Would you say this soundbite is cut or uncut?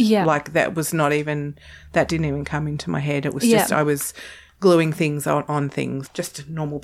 cut